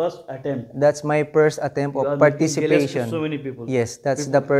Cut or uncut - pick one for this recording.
uncut